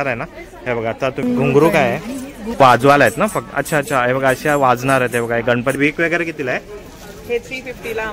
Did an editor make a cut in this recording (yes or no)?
yes